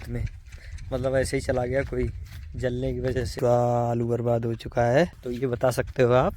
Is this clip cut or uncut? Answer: cut